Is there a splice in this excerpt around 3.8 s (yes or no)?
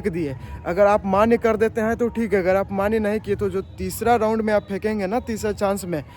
no